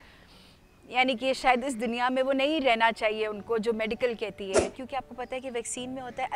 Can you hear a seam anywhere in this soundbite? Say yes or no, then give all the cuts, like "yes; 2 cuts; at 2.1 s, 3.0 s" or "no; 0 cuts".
yes; 1 cut; at 4.8 s